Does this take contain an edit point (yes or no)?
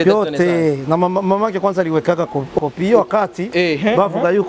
yes